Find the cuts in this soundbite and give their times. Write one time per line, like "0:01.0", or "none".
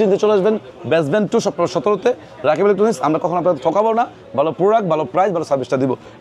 none